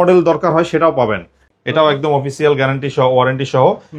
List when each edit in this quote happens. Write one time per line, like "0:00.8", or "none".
0:01.5